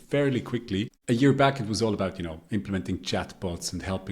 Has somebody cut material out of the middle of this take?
yes; 1 cut; at 1.0 s

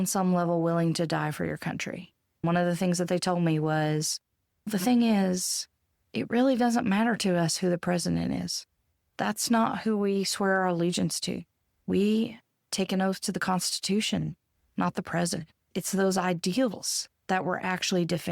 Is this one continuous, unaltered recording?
no; 2 cuts; at 2.4 s, 15.8 s

